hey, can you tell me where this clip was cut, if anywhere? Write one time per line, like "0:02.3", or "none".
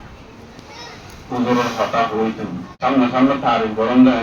0:02.7